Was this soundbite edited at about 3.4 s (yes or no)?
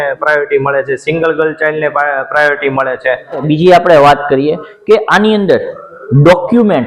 yes